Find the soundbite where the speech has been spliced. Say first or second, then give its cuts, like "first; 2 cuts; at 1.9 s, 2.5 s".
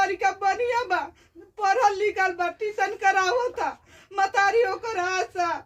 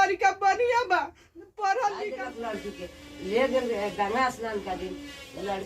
second; 1 cut; at 2.3 s